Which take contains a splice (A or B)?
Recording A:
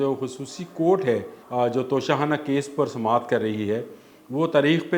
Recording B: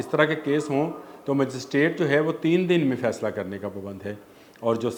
A